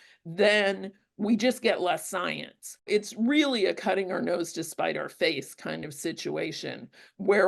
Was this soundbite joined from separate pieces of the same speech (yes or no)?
yes